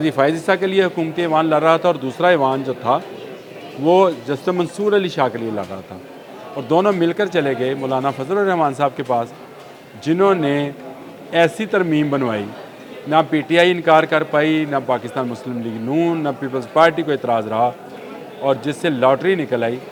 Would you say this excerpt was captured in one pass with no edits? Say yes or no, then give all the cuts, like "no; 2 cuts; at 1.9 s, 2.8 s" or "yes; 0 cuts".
yes; 0 cuts